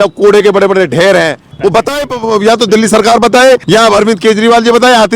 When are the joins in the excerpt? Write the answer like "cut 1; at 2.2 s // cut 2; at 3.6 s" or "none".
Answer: cut 1; at 1.5 s // cut 2; at 3.6 s

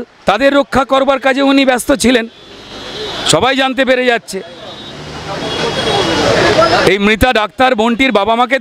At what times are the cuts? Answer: none

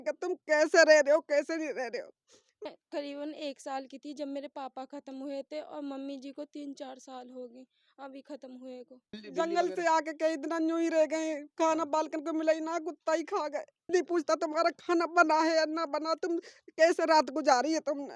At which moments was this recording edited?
cut 1; at 2.6 s // cut 2; at 9.2 s // cut 3; at 13.9 s

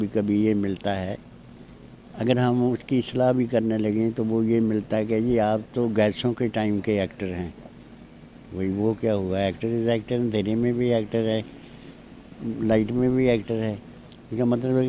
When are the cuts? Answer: none

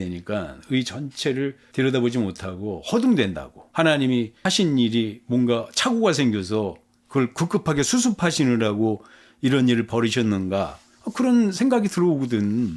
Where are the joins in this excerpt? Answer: none

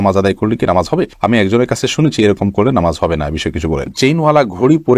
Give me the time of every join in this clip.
cut 1; at 3.9 s

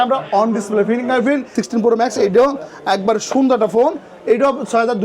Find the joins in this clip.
cut 1; at 1.6 s

